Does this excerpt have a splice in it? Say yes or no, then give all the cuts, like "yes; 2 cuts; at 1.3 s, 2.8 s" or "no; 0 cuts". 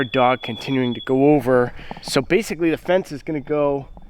yes; 1 cut; at 1.9 s